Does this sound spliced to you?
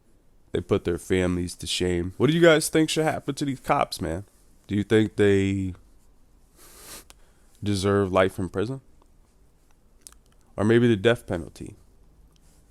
yes; 1 cut; at 2.1 s

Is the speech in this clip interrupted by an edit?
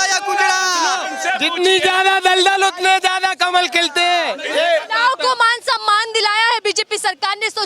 yes; 2 cuts; at 1.0 s, 4.4 s

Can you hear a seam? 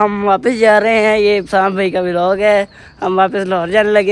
no; 0 cuts

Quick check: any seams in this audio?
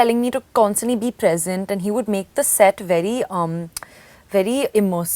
no; 0 cuts

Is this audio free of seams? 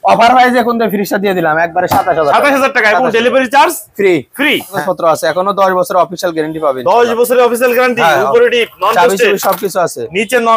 no; 1 cut; at 4.8 s

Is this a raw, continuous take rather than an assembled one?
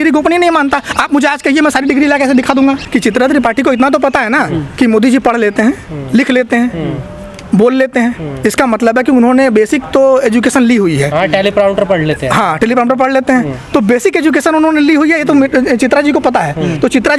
no; 1 cut; at 2.8 s

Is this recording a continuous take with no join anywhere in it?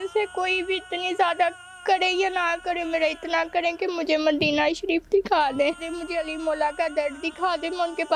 no; 1 cut; at 5.9 s

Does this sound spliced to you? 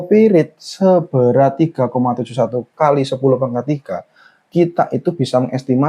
yes; 1 cut; at 2.7 s

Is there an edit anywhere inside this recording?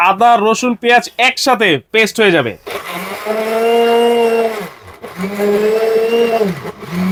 no; 0 cuts

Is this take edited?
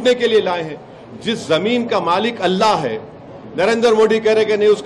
no; 0 cuts

